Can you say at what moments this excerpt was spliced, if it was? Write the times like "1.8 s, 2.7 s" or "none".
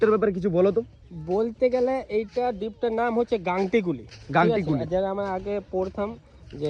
none